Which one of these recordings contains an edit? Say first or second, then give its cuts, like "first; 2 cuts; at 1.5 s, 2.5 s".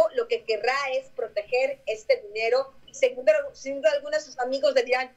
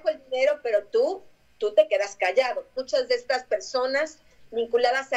second; 1 cut; at 2.8 s